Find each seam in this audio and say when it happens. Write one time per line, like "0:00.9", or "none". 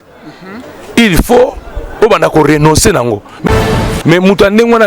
0:03.5